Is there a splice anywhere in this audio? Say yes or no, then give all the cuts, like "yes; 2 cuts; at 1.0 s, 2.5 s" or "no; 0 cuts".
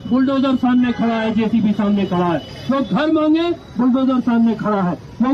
no; 0 cuts